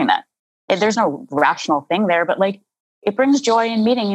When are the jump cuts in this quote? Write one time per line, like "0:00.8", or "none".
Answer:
0:00.9